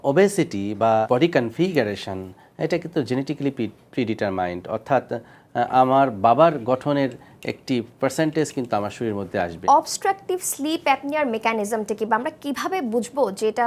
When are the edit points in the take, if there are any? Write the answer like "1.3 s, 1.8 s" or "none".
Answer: 1.1 s, 9.6 s

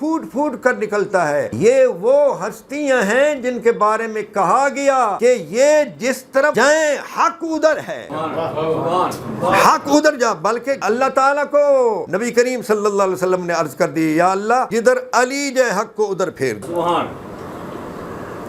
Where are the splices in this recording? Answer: 1.5 s, 5.1 s, 6.5 s, 8.1 s, 10.8 s, 12.1 s, 14.7 s, 16.6 s

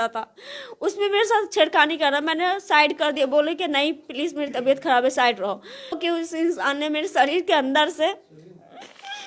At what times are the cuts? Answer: 6.0 s

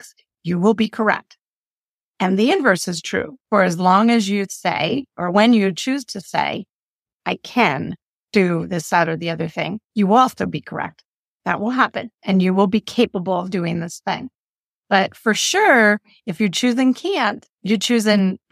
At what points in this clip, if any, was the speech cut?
17.5 s

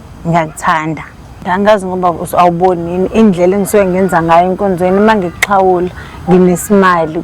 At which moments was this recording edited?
1.4 s

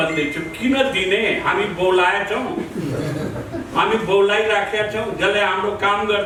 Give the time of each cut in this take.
none

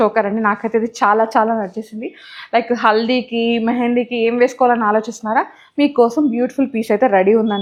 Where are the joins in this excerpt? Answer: none

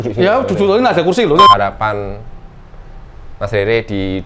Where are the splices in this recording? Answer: 1.5 s

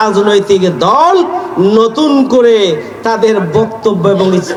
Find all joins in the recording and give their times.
none

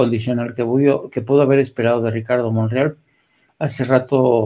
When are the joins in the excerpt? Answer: none

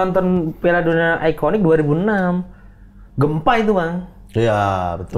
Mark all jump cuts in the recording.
none

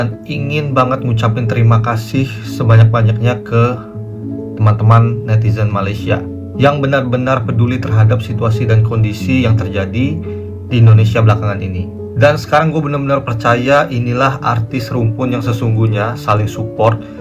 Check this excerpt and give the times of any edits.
none

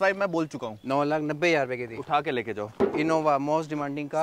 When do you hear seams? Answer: none

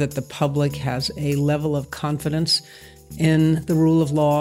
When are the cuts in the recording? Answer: none

